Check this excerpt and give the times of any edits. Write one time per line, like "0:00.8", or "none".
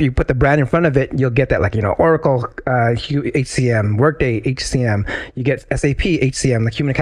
none